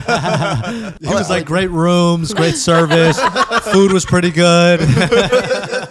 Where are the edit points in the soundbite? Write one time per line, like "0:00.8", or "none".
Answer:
0:00.9